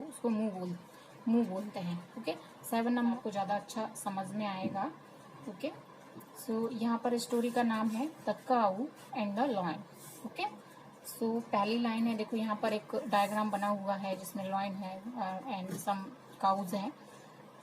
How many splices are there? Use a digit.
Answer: 1